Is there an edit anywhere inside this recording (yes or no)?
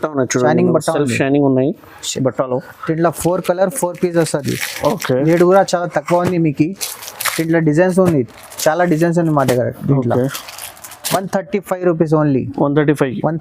no